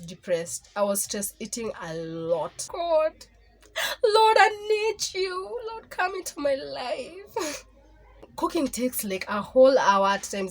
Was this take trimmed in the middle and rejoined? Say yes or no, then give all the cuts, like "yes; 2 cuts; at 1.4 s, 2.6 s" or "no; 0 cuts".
yes; 2 cuts; at 2.6 s, 8.3 s